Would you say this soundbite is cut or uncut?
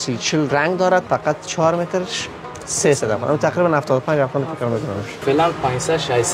cut